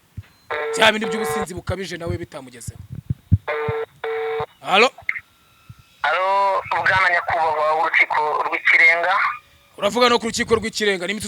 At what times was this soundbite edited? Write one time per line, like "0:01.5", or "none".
0:04.6